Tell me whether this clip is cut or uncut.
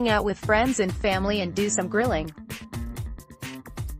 cut